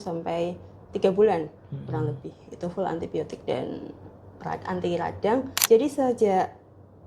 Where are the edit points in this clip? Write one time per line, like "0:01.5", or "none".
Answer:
0:05.5